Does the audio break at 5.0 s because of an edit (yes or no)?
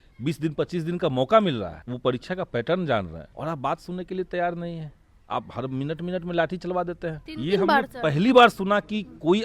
no